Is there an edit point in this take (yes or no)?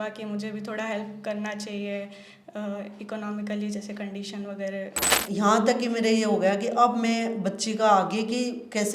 yes